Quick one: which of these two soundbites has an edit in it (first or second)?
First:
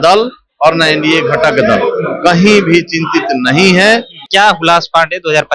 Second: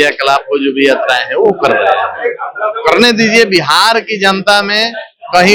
first